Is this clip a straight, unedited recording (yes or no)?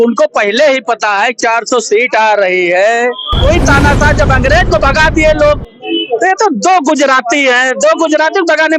no